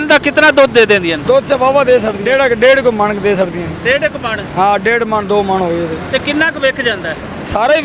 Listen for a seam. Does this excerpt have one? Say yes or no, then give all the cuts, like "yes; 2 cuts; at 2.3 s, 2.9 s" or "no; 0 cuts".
yes; 2 cuts; at 1.2 s, 2.2 s